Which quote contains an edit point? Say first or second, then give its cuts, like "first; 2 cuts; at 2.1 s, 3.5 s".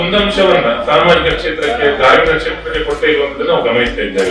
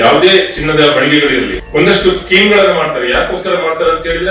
second; 1 cut; at 1.6 s